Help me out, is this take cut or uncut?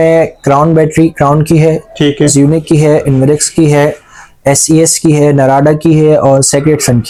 uncut